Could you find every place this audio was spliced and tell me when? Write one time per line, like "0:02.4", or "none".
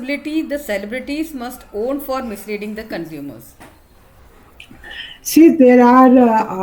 none

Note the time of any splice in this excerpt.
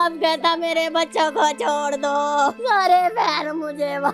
0:02.6

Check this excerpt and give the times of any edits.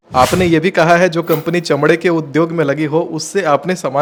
none

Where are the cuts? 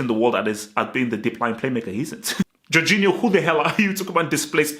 0:02.6

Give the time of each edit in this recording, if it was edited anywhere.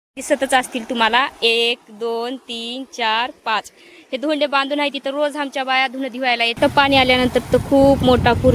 0:06.5

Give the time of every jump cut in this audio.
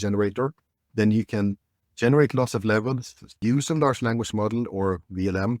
0:03.4

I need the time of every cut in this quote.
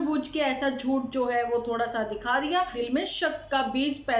0:02.8

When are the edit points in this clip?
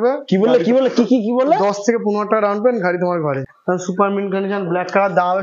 0:03.4

